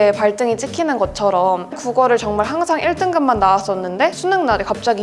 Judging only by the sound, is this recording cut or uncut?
cut